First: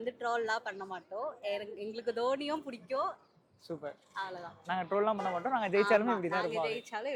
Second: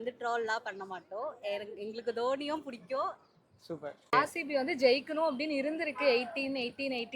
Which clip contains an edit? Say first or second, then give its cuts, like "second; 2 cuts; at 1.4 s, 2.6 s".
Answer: second; 1 cut; at 4.1 s